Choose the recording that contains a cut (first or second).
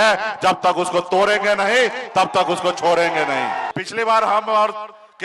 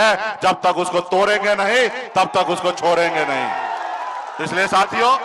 first